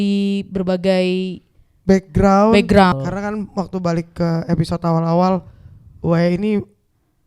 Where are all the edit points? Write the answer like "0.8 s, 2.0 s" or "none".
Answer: 2.9 s